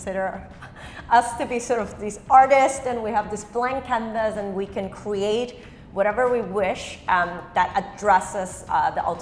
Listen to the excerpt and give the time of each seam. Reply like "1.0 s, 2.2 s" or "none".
none